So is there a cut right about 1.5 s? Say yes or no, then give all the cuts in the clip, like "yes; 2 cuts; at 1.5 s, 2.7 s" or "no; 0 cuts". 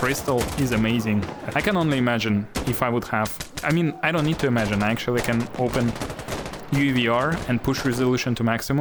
no; 0 cuts